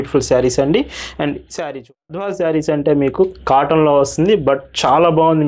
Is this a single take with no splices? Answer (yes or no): no